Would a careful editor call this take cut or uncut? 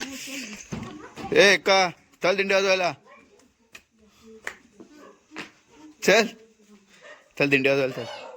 uncut